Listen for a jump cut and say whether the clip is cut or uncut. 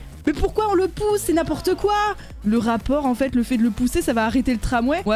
uncut